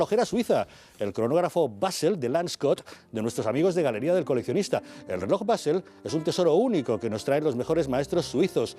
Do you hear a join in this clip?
yes; 1 cut; at 3.5 s

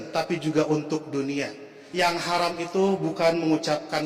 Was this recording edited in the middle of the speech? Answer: yes; 1 cut; at 1.8 s

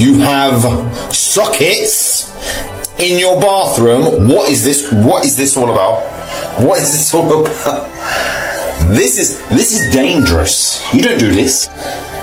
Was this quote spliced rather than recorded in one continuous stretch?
no; 0 cuts

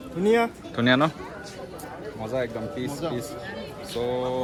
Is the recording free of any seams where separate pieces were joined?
yes; 0 cuts

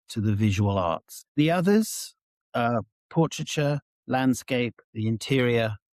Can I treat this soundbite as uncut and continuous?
no; 1 cut; at 4.9 s

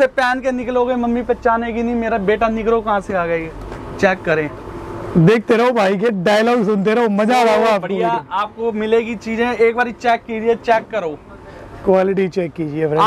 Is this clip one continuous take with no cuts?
yes; 0 cuts

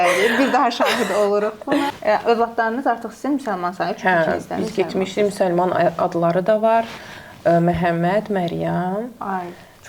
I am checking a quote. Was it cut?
yes; 1 cut; at 2.0 s

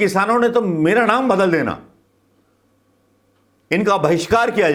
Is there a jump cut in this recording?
no; 0 cuts

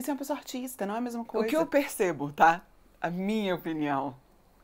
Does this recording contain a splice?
yes; 1 cut; at 1.4 s

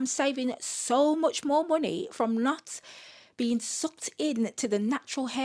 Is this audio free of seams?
yes; 0 cuts

